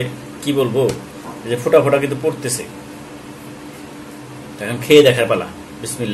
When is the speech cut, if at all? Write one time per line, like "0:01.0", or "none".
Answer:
none